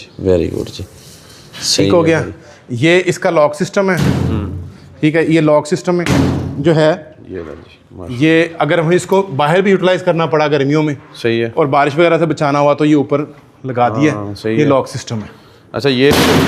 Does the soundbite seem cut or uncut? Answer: uncut